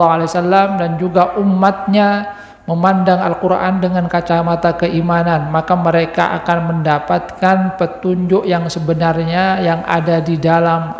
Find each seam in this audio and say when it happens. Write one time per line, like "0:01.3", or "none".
none